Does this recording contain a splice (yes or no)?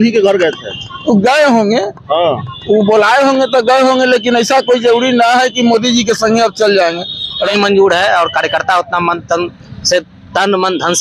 yes